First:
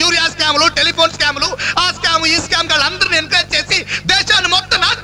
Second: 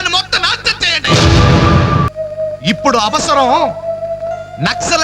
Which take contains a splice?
second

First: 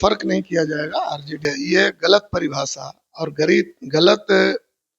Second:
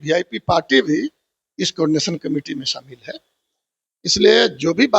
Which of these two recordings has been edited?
first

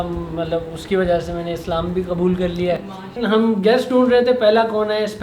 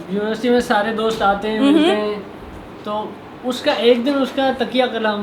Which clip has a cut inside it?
first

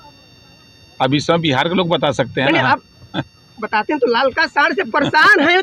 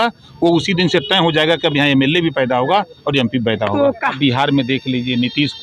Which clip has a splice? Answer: second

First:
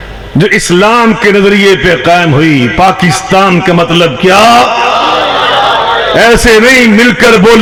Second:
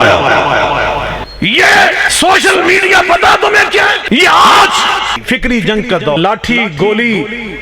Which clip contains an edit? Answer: second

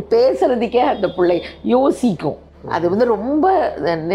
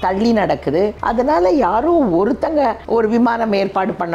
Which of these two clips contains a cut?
second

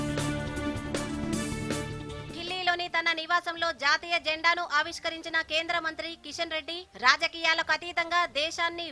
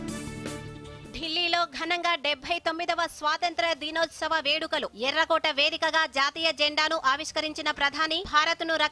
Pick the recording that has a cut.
second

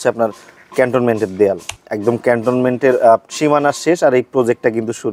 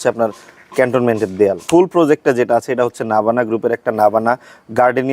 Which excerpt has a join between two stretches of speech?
second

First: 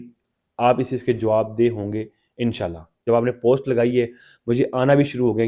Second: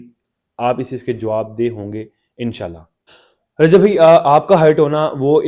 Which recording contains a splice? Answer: first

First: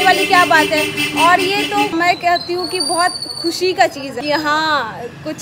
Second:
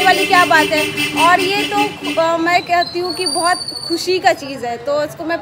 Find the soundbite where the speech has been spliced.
first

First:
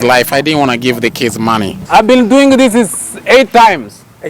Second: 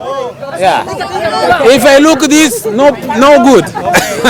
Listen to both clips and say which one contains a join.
first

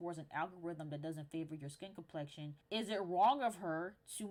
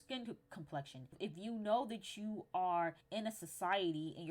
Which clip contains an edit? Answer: second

